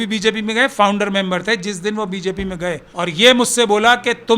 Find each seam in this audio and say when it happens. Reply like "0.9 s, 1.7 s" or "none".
2.9 s

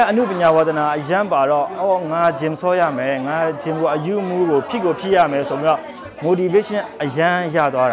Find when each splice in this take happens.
none

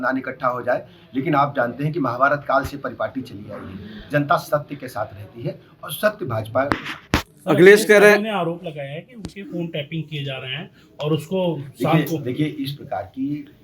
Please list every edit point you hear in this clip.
none

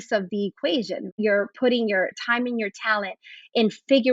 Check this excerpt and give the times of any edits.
1.2 s, 2.2 s

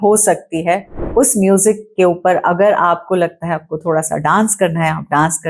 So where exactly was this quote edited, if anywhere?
0.9 s

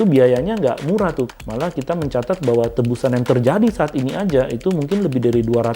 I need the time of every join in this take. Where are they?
1.3 s

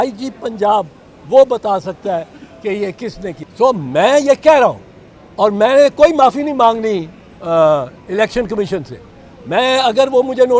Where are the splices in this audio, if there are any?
3.3 s

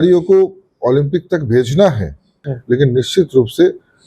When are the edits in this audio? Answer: 2.5 s

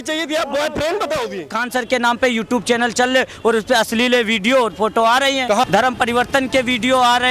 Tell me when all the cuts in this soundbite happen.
1.6 s, 5.6 s

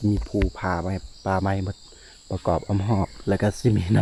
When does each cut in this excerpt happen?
none

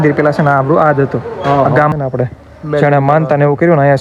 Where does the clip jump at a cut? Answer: 1.9 s

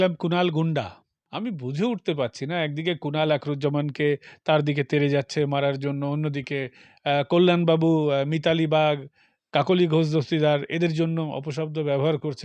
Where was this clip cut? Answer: 1.2 s

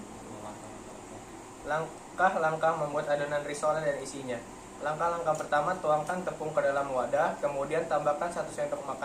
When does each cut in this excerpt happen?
7.4 s

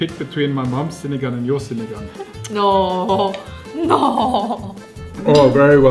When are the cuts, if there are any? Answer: 4.9 s

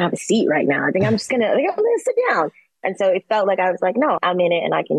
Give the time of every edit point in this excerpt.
none

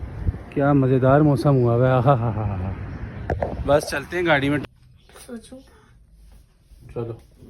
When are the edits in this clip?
4.6 s

